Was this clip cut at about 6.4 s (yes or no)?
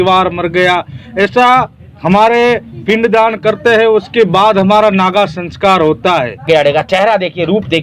yes